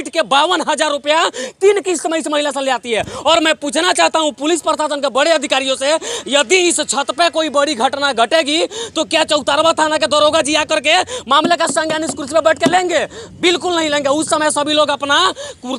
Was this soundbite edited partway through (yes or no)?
no